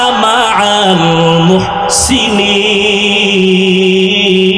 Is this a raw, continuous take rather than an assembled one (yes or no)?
yes